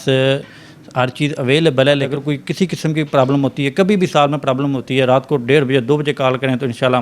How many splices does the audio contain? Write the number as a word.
one